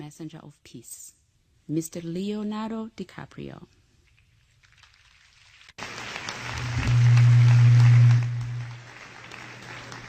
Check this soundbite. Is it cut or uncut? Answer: cut